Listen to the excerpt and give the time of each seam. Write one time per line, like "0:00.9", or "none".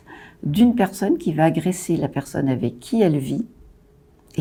none